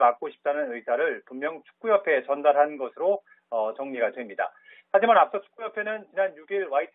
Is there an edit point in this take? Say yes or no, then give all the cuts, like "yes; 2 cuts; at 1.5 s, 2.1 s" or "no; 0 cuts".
no; 0 cuts